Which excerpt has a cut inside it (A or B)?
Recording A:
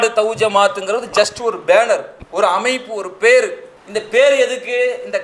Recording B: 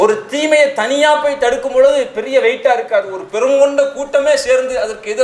A